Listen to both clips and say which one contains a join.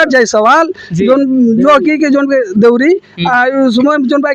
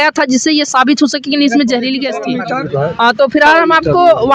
second; 1 cut; at 2.3 s

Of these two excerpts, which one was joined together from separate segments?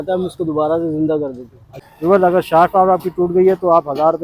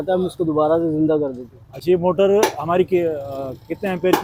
first; 1 cut; at 1.7 s

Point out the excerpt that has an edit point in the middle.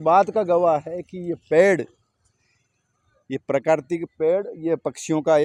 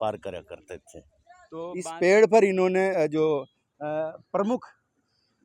second; 1 cut; at 1.5 s

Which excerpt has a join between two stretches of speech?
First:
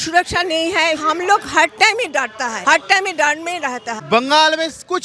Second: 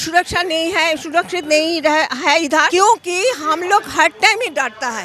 first; 2 cuts; at 1.0 s, 3.9 s

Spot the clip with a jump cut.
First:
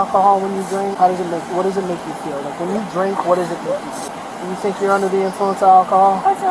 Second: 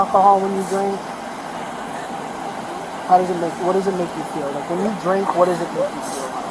first; 2 cuts; at 0.9 s, 4.1 s

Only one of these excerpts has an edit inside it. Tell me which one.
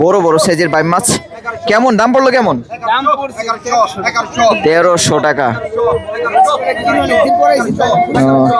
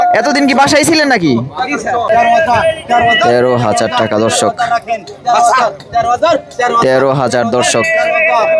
second; 1 cut; at 2.1 s

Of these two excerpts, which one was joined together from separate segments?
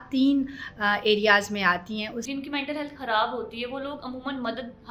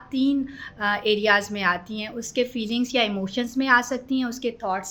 first; 1 cut; at 2.2 s

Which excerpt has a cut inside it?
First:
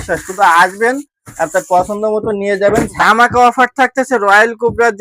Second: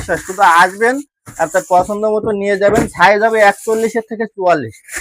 first; 1 cut; at 2.9 s

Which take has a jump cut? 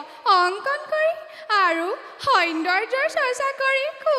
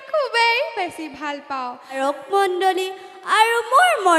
second; 1 cut; at 2.0 s

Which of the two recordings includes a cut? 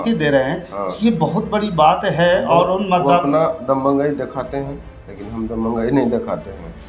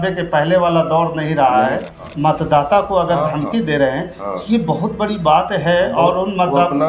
second; 1 cut; at 2.1 s

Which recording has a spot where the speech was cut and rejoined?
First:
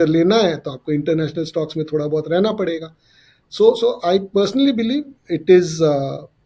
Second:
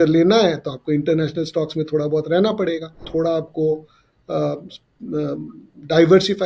second; 1 cut; at 3.1 s

